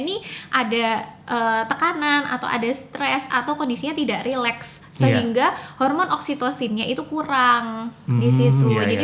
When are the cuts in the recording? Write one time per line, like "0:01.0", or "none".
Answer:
none